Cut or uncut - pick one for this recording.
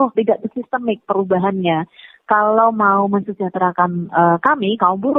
uncut